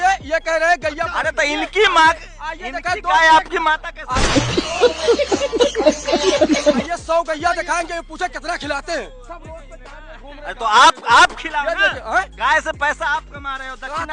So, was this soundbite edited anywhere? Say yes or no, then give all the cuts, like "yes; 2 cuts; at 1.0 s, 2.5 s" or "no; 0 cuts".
no; 0 cuts